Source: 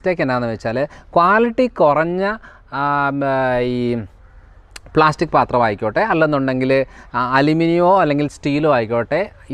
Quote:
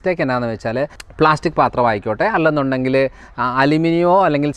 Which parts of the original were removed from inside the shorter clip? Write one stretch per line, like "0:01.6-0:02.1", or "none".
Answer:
0:01.0-0:04.7